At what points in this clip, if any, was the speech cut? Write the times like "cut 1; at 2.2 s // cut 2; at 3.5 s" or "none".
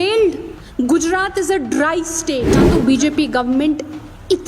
cut 1; at 2.6 s